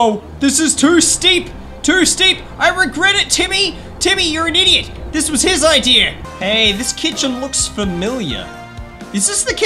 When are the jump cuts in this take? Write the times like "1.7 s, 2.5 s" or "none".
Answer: 6.1 s